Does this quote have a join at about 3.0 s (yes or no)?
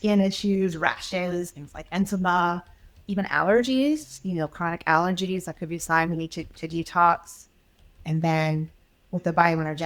yes